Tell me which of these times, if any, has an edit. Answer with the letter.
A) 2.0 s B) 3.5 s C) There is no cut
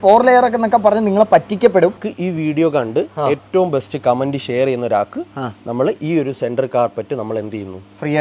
A